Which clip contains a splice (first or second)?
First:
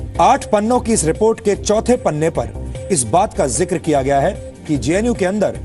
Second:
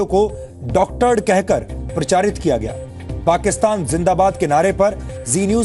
first